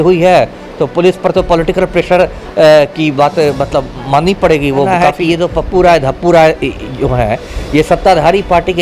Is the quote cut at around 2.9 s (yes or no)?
no